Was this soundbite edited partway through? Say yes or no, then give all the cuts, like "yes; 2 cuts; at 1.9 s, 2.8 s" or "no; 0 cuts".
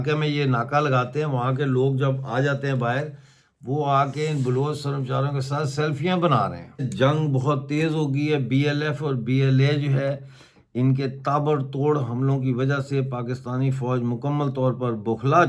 yes; 1 cut; at 6.9 s